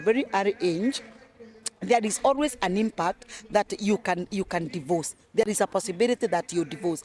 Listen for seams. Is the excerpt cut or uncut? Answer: uncut